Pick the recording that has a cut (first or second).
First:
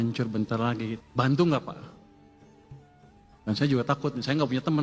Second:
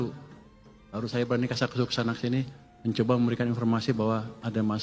first